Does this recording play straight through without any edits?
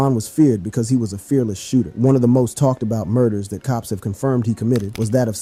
yes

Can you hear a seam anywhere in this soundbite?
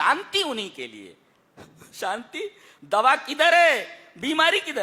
no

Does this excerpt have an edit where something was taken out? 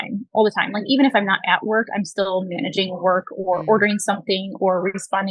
no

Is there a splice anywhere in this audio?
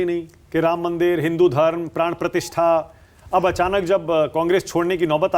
no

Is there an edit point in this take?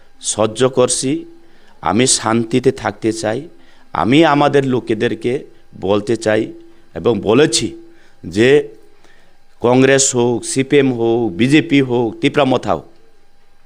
no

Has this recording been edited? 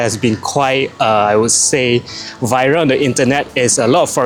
no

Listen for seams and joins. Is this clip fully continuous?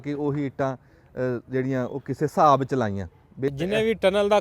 no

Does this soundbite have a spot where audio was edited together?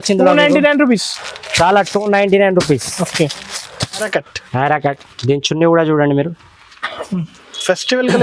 yes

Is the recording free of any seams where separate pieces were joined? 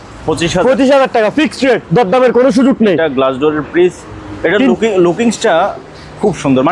yes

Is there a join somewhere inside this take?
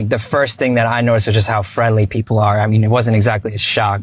no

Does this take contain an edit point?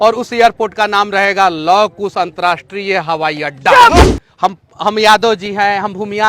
yes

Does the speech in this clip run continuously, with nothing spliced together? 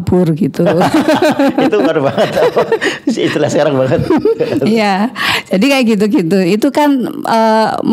yes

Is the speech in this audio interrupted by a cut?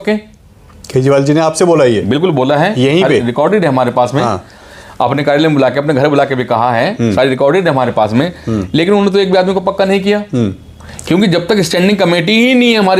no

